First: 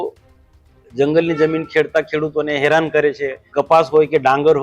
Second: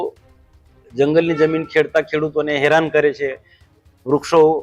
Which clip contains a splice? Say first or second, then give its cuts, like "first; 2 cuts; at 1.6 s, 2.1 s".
first; 1 cut; at 3.4 s